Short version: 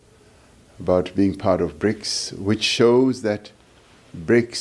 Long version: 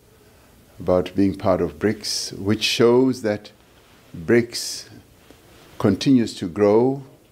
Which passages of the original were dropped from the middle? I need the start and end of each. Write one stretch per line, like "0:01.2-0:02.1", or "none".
none